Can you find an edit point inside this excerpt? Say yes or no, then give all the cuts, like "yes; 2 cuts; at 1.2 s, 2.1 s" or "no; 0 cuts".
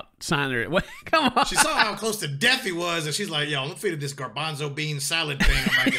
yes; 1 cut; at 1.6 s